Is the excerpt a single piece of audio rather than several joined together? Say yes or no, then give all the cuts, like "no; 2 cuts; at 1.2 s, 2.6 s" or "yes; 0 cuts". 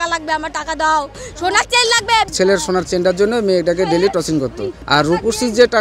no; 1 cut; at 2.3 s